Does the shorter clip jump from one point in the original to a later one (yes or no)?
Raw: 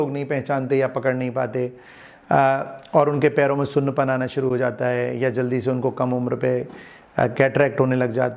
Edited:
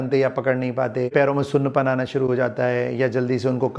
yes